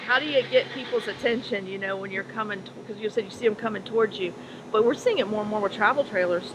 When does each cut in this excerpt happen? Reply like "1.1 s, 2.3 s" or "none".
none